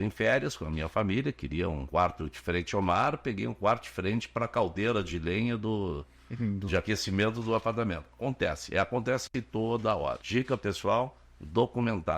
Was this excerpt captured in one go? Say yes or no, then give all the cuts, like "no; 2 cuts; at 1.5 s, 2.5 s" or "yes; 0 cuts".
no; 2 cuts; at 1.8 s, 10.2 s